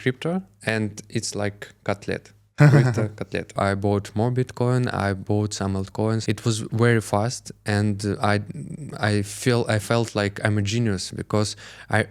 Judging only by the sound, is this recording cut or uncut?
cut